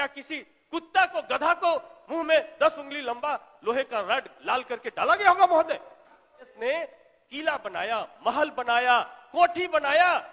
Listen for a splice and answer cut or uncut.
cut